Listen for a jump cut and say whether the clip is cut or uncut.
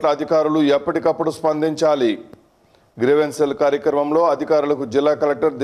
uncut